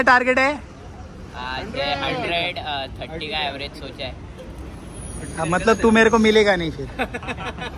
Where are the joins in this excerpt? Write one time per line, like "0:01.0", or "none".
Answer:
none